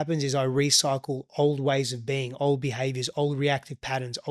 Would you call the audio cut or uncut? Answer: uncut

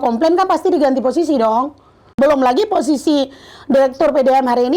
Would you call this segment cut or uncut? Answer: cut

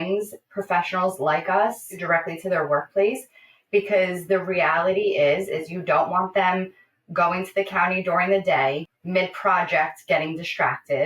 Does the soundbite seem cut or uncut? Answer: cut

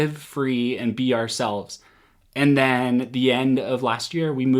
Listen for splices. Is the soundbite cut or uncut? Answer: uncut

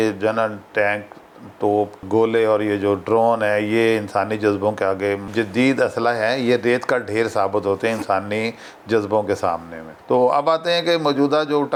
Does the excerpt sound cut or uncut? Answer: uncut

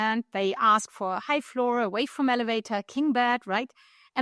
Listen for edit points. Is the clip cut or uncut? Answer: uncut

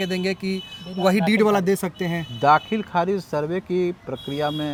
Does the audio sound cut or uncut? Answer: uncut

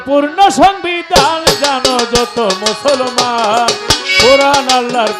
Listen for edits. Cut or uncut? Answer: uncut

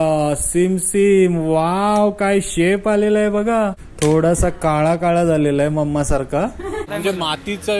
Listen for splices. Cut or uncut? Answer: cut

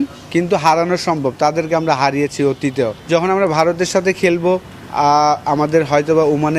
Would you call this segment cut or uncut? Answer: cut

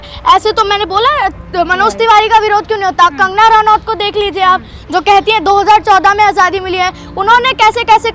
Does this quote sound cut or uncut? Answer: uncut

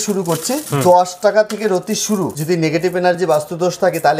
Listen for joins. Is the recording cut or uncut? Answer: cut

